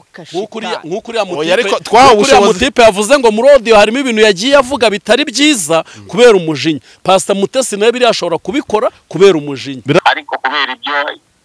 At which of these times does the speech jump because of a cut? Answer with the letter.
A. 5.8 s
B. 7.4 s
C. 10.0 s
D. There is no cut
C